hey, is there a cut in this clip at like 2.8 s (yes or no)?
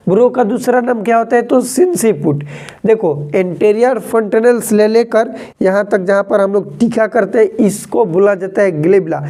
no